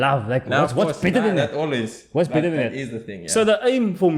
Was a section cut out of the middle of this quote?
no; 0 cuts

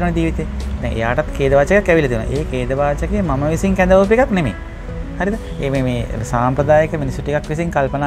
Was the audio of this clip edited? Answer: no; 0 cuts

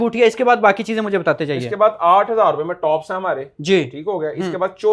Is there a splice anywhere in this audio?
no; 0 cuts

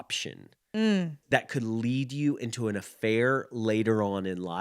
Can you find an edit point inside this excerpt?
yes; 1 cut; at 1.2 s

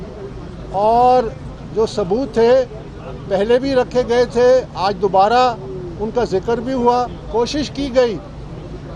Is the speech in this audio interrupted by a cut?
yes; 1 cut; at 7.2 s

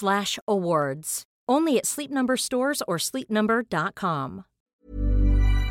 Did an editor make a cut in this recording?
yes; 1 cut; at 4.7 s

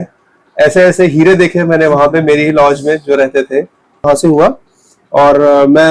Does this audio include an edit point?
yes; 1 cut; at 4.0 s

